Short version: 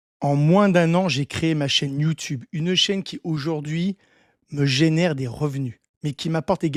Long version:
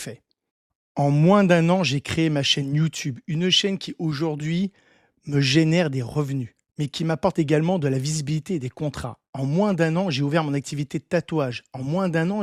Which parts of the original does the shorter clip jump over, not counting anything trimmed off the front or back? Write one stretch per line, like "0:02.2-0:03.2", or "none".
none